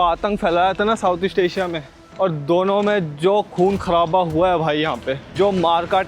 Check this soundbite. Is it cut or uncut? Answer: cut